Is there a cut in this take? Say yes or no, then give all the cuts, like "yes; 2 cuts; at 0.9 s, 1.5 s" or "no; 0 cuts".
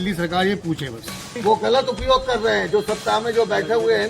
yes; 1 cut; at 1.3 s